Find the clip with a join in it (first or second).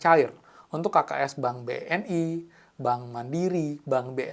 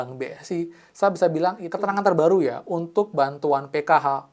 second